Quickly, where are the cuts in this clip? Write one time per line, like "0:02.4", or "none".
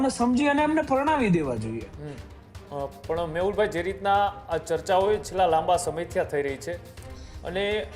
none